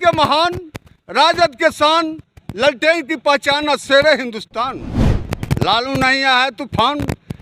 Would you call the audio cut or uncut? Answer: uncut